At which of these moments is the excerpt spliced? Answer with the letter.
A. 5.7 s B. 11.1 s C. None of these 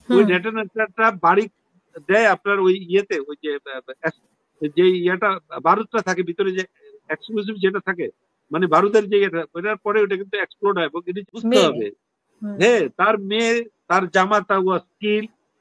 B